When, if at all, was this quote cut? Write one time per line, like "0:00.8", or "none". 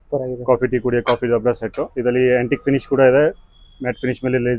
none